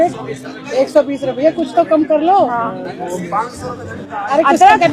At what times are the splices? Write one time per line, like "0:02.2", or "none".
none